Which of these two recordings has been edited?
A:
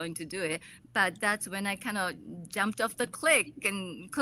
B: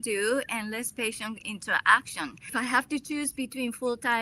B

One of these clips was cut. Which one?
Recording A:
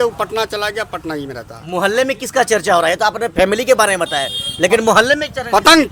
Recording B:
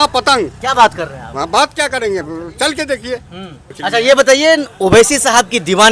B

